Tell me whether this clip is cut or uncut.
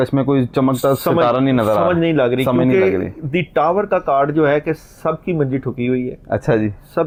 uncut